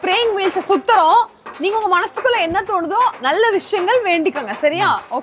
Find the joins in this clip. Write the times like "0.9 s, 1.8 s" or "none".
none